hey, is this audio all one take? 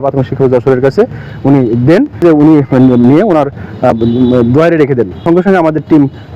no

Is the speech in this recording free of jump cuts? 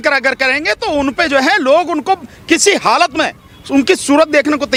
yes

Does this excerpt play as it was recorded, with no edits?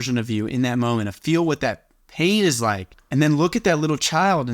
no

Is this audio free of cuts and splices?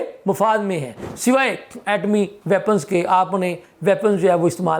no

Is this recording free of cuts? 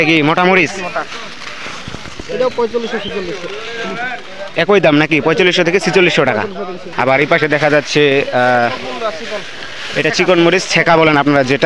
no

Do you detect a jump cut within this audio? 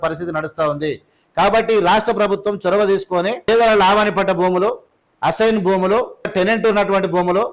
yes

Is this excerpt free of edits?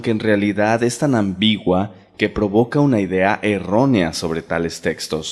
yes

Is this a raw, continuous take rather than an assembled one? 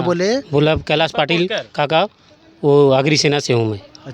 yes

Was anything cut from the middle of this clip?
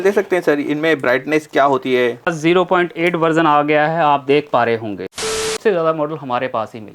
yes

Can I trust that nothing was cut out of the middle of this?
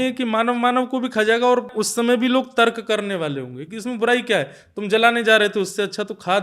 no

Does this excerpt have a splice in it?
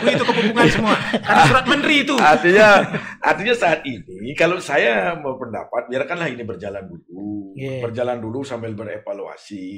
no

